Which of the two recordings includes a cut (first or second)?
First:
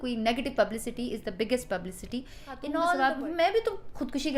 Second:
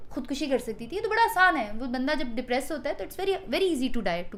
first